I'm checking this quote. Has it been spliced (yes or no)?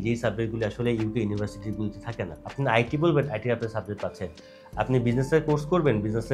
no